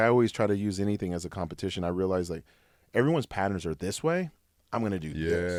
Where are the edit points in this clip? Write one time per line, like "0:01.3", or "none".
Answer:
none